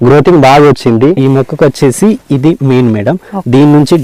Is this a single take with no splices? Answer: no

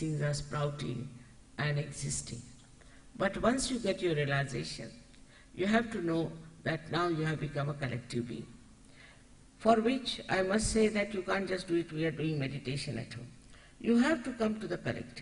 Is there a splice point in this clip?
no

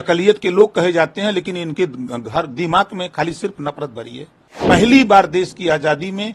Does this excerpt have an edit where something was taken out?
yes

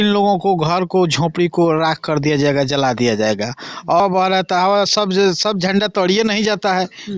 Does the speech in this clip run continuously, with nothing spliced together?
no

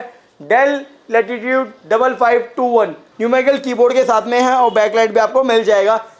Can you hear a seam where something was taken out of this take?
yes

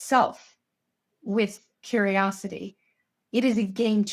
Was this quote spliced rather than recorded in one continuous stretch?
yes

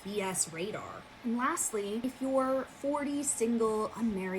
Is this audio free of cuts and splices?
no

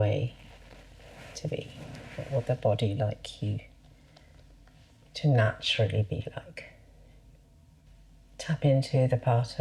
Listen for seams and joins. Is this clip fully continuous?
no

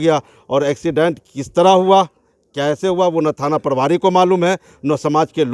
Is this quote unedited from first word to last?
yes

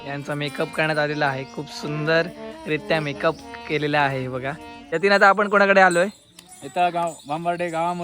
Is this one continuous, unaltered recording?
no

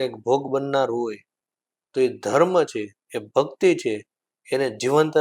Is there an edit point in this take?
no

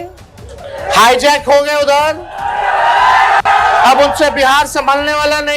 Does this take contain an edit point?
no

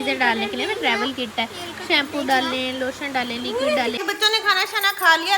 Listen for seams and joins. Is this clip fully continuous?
no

